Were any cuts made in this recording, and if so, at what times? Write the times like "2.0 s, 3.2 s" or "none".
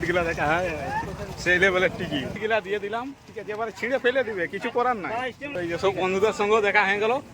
2.4 s, 5.4 s